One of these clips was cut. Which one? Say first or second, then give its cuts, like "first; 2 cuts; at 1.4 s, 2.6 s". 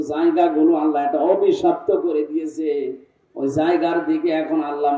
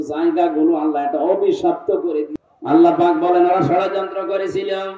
second; 1 cut; at 2.4 s